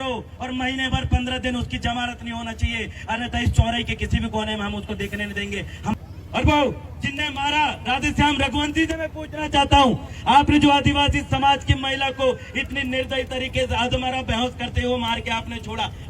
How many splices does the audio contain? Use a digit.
1